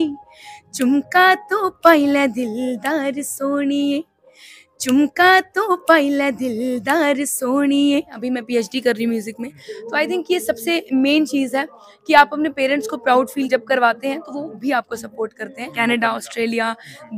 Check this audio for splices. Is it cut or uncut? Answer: cut